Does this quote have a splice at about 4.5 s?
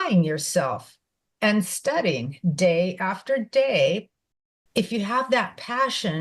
yes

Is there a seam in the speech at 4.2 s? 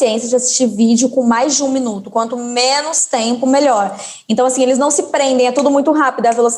no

